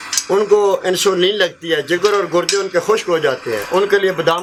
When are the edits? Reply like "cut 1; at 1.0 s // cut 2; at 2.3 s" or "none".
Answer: none